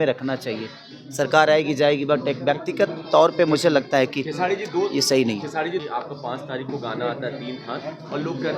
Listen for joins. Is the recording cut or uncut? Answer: cut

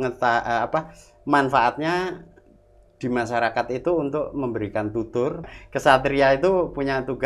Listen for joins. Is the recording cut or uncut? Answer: cut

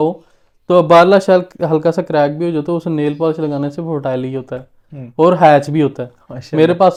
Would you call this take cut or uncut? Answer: uncut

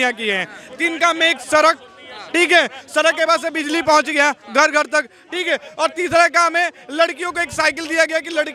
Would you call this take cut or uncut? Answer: uncut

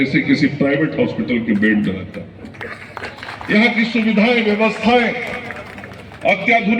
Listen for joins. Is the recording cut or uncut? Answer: uncut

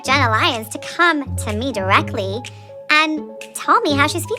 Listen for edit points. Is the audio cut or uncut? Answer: uncut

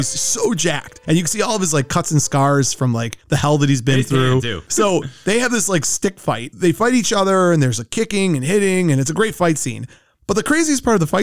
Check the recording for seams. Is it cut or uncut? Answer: cut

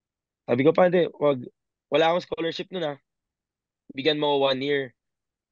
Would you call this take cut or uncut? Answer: uncut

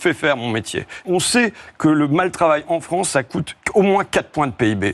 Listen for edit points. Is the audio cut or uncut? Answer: cut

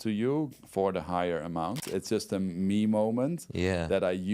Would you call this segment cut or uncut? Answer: cut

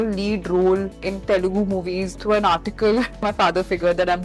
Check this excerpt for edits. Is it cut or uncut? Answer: cut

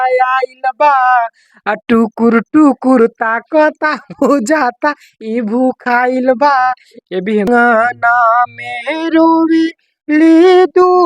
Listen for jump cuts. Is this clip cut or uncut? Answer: cut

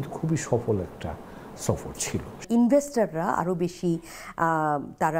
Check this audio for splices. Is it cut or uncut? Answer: uncut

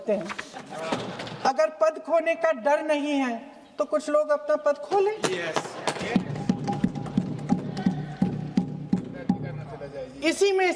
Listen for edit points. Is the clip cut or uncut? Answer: cut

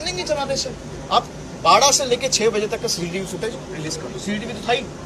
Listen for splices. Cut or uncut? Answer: cut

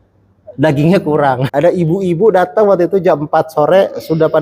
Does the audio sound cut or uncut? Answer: cut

